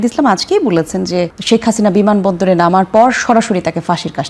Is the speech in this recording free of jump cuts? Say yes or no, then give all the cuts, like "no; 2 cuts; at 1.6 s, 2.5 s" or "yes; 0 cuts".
yes; 0 cuts